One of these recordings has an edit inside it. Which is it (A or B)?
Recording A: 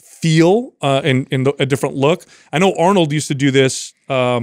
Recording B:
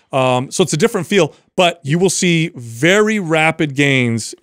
B